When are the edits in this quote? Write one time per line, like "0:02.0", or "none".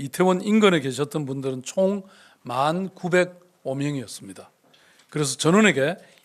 none